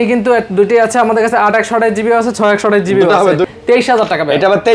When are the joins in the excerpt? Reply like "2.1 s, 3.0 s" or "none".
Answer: 3.5 s